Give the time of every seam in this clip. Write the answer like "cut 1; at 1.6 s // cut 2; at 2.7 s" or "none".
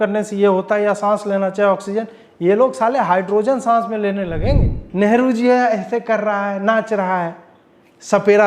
cut 1; at 4.8 s